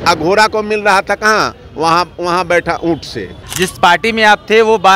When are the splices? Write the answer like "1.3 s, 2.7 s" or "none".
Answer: 3.4 s